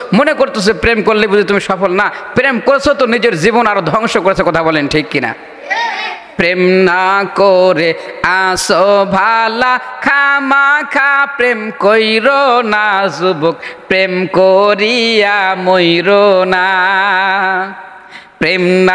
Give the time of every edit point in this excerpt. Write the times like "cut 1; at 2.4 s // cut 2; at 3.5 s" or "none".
cut 1; at 6.3 s